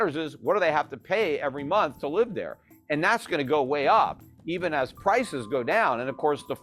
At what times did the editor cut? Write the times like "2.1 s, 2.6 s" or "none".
none

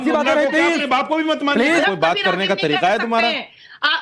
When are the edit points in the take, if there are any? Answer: 1.8 s

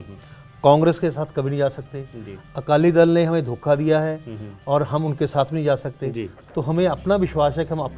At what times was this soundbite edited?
none

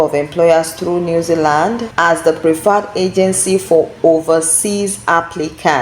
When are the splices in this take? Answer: 1.9 s

